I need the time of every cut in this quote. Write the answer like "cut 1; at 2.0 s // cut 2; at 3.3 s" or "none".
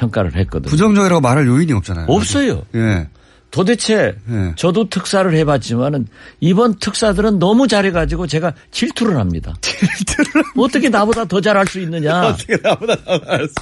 cut 1; at 0.9 s

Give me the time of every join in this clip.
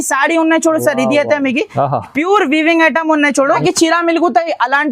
cut 1; at 3.6 s

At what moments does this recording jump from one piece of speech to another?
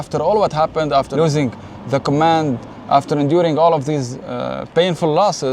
cut 1; at 1.1 s

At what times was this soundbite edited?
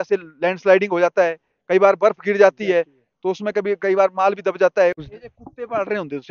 cut 1; at 5.1 s

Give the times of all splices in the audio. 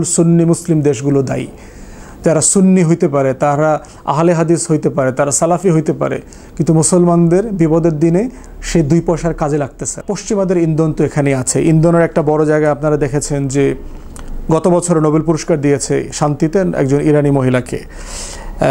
cut 1; at 10.0 s

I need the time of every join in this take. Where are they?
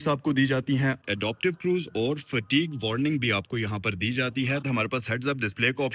cut 1; at 1.0 s // cut 2; at 4.6 s

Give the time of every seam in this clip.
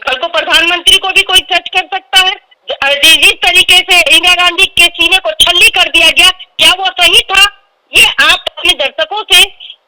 none

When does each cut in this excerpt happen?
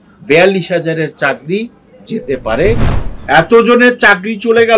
cut 1; at 3.0 s

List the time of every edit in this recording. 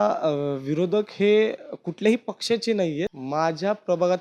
cut 1; at 3.2 s

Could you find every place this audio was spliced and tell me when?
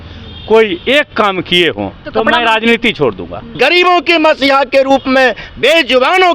cut 1; at 2.0 s // cut 2; at 3.4 s

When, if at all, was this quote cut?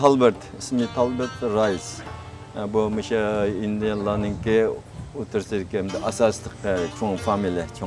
cut 1; at 0.9 s

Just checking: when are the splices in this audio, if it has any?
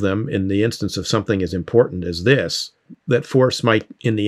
cut 1; at 2.9 s

